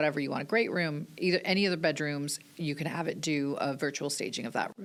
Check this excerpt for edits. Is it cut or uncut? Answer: uncut